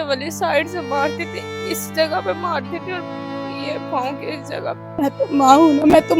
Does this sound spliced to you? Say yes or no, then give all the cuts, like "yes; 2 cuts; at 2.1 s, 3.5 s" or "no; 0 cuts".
yes; 1 cut; at 5.0 s